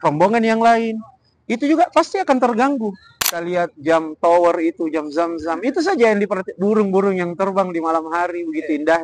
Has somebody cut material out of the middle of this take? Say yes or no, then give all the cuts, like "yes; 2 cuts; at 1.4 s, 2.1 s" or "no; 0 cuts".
yes; 1 cut; at 3.3 s